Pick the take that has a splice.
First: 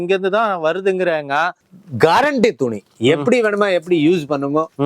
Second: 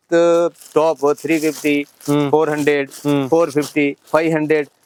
first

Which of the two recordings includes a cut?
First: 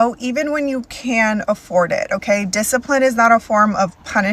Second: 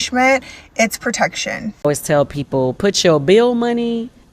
second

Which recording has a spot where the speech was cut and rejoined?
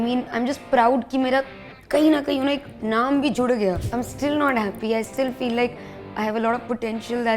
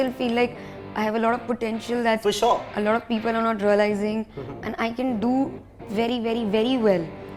first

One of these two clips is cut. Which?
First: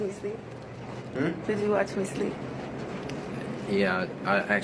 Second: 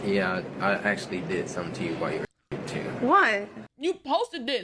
second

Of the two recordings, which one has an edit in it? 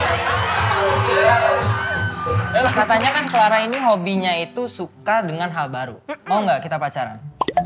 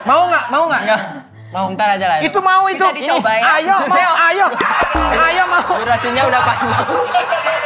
first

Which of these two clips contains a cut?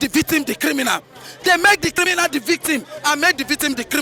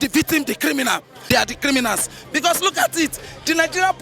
second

